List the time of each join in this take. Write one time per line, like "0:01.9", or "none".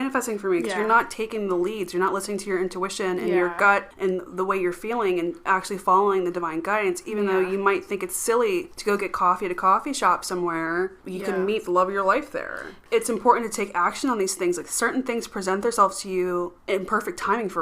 0:03.9
0:08.7
0:11.0
0:12.7
0:16.6